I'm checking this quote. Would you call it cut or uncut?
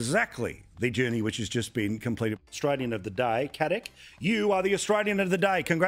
cut